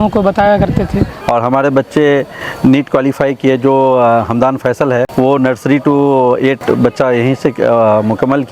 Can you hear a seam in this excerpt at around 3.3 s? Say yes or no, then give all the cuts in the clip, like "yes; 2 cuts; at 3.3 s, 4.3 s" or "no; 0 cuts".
no; 3 cuts; at 1.1 s, 5.1 s, 6.6 s